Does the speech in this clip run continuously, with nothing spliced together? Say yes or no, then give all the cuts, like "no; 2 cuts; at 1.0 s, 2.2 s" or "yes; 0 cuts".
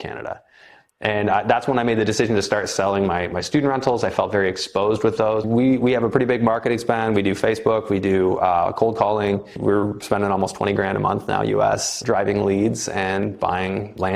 no; 3 cuts; at 5.4 s, 9.6 s, 11.9 s